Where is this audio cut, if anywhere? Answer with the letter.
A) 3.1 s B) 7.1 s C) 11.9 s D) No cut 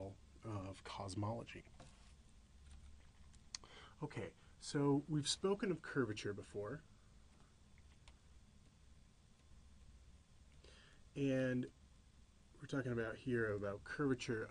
A